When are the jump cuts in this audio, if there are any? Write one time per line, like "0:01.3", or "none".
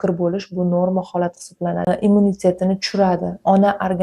0:01.9